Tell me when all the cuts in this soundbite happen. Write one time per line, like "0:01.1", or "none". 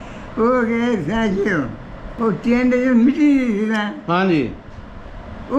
none